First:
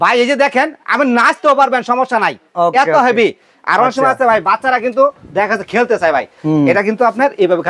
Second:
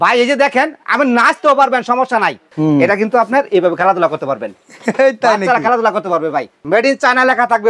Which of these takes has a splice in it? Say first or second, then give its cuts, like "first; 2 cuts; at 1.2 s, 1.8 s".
second; 2 cuts; at 2.4 s, 6.6 s